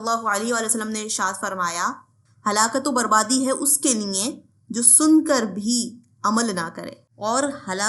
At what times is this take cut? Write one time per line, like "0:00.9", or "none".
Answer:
none